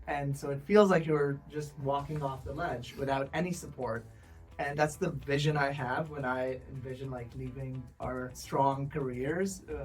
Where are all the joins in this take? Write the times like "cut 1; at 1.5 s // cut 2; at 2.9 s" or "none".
cut 1; at 4.7 s // cut 2; at 8.4 s